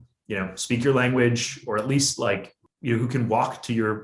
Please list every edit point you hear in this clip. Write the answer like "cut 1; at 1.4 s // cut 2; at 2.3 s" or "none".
cut 1; at 2.5 s